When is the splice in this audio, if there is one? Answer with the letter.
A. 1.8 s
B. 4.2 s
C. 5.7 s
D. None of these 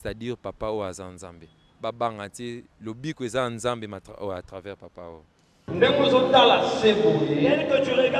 C